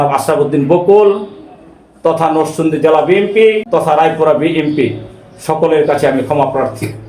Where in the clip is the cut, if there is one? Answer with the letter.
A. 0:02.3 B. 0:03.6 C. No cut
B